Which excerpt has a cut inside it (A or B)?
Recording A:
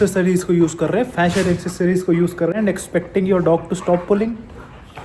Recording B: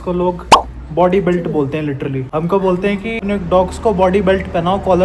B